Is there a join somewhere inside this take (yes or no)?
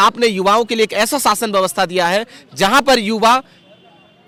no